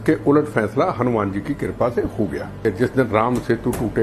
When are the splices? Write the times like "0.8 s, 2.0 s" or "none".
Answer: 2.6 s